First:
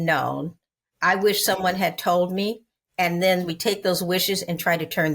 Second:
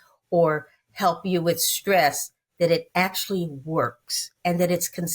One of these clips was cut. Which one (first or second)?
first